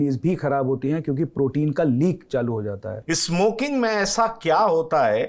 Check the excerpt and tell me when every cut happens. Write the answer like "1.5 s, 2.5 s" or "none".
2.9 s